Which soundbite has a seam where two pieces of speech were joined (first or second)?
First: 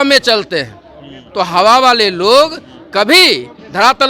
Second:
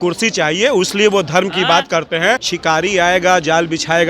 second